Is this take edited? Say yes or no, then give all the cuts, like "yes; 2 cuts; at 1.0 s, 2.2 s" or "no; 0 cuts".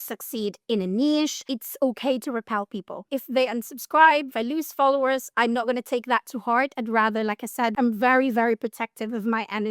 yes; 5 cuts; at 1.5 s, 3.0 s, 4.3 s, 5.3 s, 7.7 s